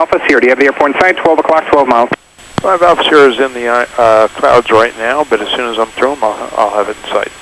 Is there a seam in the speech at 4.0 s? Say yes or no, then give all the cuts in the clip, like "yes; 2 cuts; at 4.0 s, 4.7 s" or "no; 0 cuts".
no; 0 cuts